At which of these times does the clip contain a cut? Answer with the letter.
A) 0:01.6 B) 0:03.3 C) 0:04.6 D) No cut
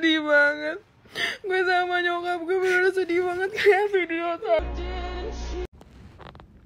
C